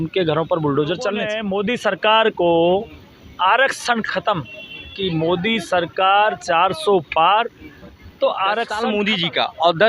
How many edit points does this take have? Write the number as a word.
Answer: two